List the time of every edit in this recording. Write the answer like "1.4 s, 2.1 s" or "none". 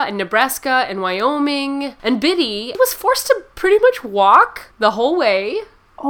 1.9 s, 2.8 s, 4.6 s